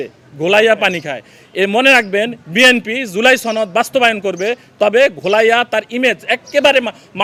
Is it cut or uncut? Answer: uncut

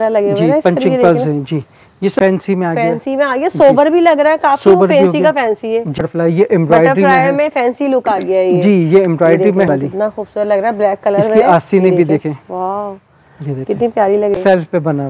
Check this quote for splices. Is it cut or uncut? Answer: cut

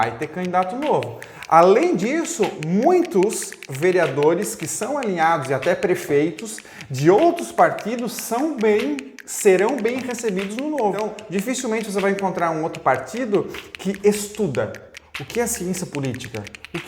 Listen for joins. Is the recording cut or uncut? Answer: cut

